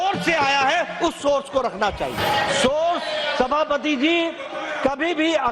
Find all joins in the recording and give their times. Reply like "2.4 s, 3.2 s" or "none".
2.2 s